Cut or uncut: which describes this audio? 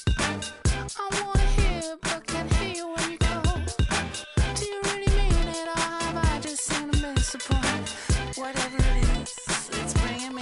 cut